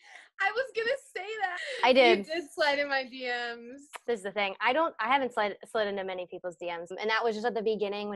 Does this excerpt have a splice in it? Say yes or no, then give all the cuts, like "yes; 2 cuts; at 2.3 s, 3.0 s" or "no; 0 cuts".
yes; 3 cuts; at 1.5 s, 4.0 s, 6.9 s